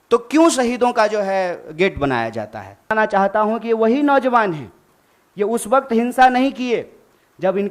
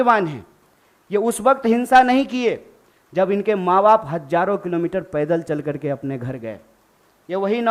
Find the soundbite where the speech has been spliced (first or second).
first